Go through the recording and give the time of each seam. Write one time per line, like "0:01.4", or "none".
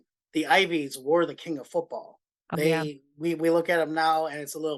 0:02.5